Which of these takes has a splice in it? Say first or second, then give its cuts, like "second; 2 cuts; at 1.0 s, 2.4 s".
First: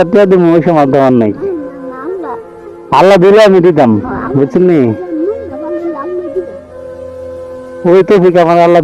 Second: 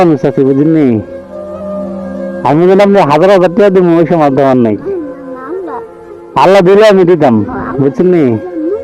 second; 2 cuts; at 1.1 s, 2.4 s